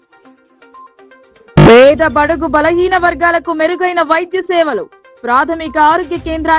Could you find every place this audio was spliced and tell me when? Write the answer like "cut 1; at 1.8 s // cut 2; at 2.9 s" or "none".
none